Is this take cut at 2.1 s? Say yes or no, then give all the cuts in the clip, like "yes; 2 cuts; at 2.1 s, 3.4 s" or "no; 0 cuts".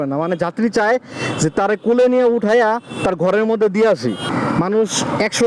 no; 1 cut; at 4.2 s